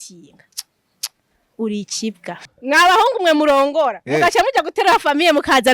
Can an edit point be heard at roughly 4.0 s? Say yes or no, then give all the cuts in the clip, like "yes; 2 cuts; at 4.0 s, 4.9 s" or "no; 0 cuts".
no; 1 cut; at 2.5 s